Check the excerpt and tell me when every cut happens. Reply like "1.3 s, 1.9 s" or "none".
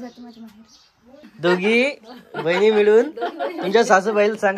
1.3 s